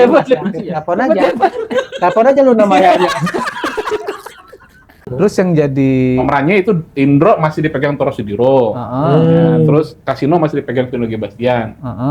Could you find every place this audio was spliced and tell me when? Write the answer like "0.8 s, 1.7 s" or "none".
5.0 s